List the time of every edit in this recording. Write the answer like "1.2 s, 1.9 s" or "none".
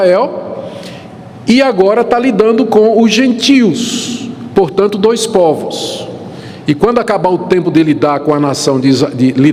none